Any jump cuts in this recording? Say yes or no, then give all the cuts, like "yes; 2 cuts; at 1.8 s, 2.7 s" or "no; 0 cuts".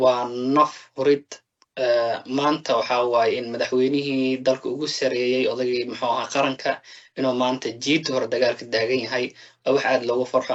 no; 0 cuts